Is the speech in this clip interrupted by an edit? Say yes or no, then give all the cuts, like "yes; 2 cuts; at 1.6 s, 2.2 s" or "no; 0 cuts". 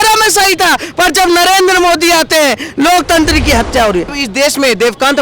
yes; 1 cut; at 4.1 s